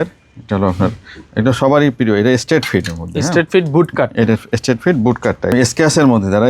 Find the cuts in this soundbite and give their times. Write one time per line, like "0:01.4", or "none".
0:05.5